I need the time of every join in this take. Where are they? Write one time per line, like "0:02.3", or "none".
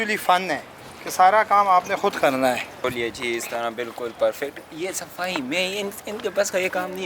0:02.7